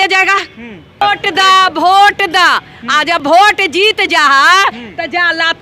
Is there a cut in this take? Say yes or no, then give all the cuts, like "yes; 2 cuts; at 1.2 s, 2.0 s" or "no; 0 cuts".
yes; 1 cut; at 1.0 s